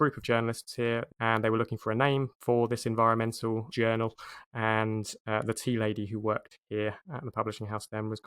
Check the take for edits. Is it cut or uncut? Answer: cut